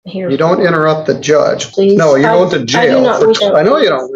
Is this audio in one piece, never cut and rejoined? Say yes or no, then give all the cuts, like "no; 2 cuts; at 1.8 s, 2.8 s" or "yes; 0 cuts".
no; 2 cuts; at 1.7 s, 3.4 s